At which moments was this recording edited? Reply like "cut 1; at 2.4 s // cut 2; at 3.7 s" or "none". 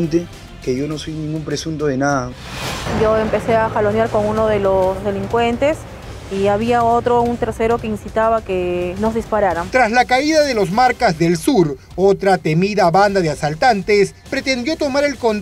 cut 1; at 2.4 s